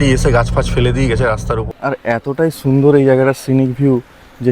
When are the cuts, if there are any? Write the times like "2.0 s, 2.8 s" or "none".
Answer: 1.6 s